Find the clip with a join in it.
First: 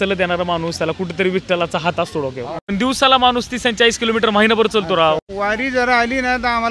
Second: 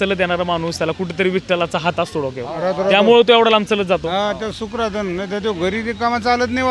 first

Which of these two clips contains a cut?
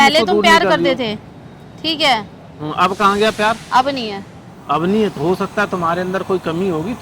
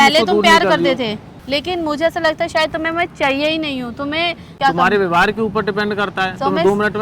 second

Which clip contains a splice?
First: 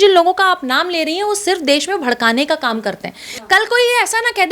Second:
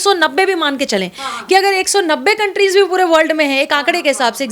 first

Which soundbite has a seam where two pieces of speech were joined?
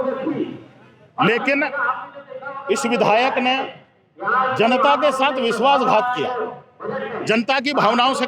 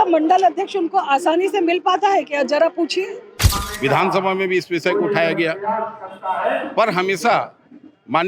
second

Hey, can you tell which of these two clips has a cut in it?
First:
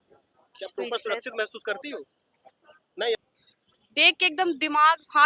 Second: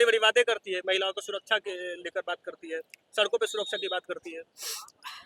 first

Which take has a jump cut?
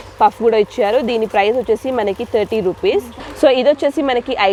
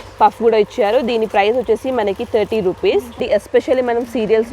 second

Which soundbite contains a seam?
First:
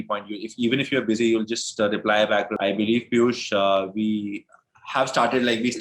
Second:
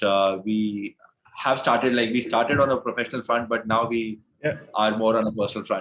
first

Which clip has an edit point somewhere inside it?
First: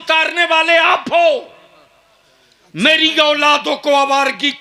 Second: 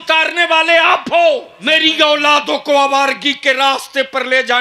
second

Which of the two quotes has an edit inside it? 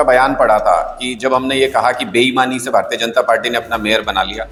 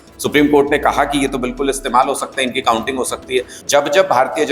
second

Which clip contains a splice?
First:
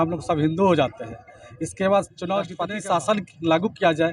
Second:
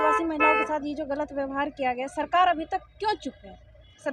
first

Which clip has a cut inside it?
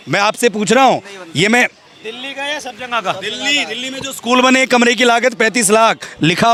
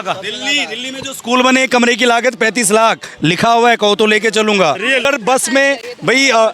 second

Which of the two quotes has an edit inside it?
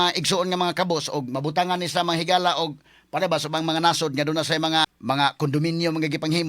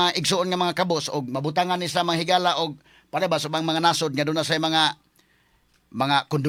first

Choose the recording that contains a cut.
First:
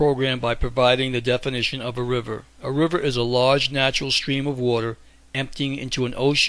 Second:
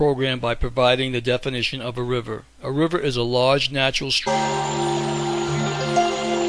first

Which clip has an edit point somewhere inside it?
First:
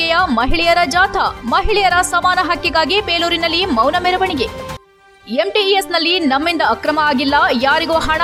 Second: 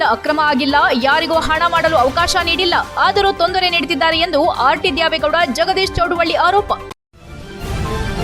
second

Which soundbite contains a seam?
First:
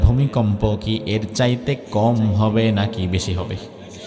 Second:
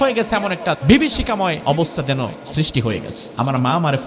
second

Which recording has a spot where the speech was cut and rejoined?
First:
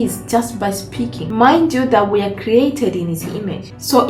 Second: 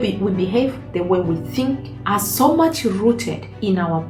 first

